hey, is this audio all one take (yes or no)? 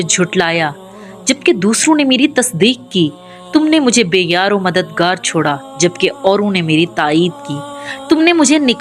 yes